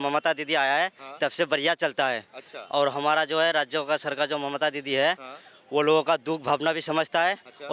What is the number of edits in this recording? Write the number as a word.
zero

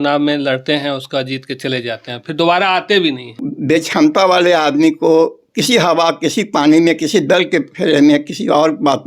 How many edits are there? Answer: one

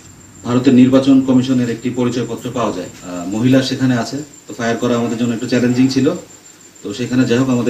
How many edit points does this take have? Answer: one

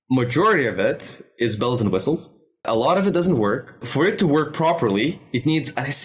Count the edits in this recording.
two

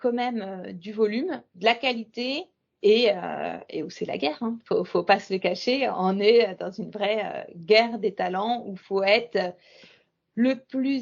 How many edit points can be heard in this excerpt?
one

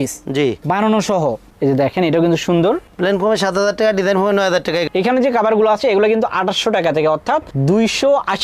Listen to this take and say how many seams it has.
two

